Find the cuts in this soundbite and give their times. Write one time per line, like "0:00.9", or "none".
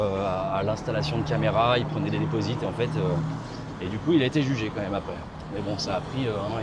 none